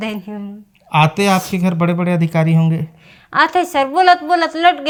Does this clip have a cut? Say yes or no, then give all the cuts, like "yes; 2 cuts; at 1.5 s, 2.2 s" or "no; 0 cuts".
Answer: no; 0 cuts